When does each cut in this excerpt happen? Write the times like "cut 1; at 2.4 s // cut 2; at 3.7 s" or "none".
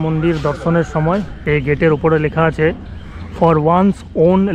cut 1; at 1.3 s